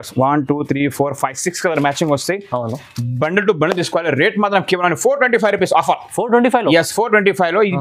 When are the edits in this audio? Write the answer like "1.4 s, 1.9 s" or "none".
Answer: none